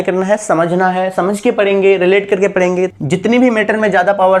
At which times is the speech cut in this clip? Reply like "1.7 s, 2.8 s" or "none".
3.0 s